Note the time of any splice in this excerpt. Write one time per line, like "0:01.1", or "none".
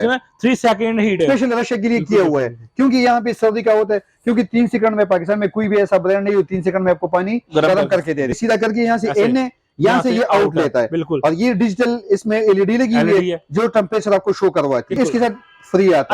0:01.2
0:08.4
0:15.0